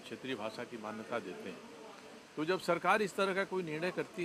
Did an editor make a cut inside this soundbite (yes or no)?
no